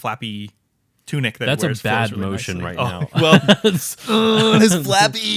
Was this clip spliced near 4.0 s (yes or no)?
no